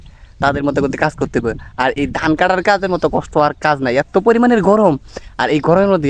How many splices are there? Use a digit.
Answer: 0